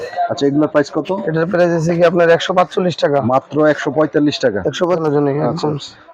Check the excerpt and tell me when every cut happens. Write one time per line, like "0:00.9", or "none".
0:05.0